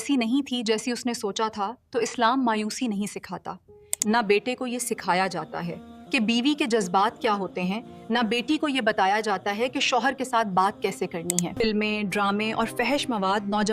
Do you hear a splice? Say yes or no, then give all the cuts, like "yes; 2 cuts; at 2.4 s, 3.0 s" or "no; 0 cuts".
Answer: yes; 2 cuts; at 3.9 s, 11.5 s